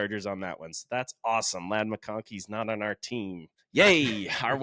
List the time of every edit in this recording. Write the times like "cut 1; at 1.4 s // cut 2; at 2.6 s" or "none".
cut 1; at 3.5 s